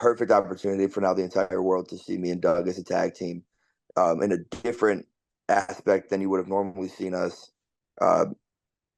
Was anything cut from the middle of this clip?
no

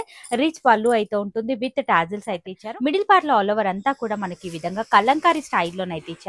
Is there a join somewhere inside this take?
yes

